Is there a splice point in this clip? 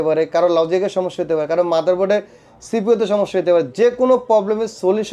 no; 0 cuts

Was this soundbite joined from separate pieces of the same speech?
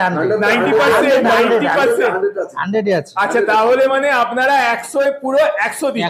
no; 0 cuts

